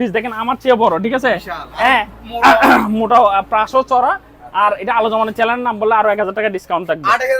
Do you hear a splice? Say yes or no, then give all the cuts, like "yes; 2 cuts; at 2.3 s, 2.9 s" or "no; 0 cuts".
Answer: no; 0 cuts